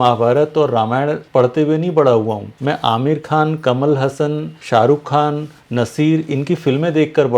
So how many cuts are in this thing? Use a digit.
3